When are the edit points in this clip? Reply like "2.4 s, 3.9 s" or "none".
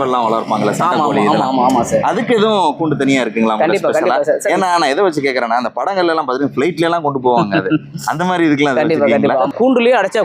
9.3 s